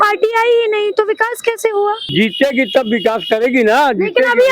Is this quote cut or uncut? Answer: cut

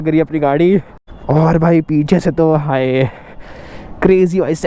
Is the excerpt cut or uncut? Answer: cut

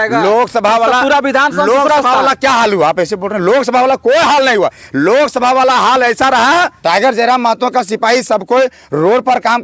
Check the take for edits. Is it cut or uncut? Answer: cut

